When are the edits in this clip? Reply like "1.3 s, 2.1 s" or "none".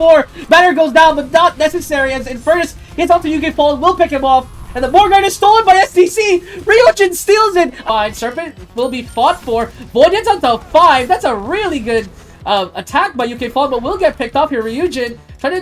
7.8 s